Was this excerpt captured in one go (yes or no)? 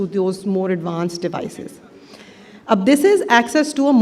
yes